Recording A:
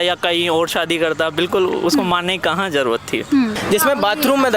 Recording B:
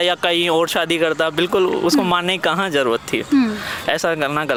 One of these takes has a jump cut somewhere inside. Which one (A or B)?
A